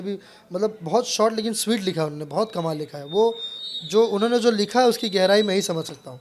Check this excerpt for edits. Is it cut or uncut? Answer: uncut